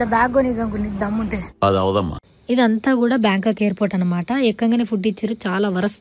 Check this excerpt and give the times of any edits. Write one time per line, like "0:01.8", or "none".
0:02.3